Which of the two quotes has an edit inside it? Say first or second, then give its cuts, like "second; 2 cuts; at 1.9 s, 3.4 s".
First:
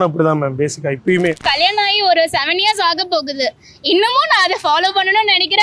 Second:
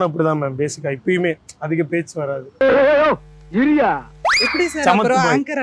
first; 1 cut; at 1.4 s